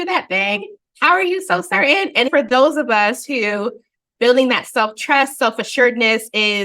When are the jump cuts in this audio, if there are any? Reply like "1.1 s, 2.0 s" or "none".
2.3 s